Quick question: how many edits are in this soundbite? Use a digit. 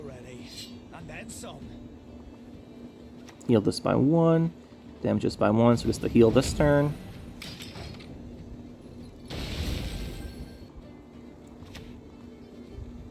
1